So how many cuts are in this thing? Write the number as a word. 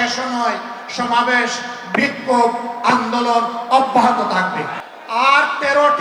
one